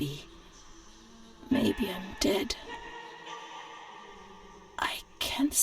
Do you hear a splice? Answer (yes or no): yes